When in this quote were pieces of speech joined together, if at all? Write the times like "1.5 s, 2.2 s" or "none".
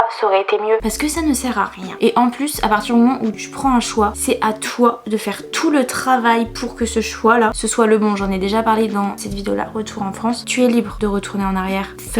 none